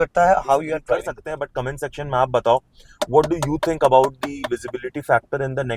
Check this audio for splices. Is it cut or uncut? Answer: cut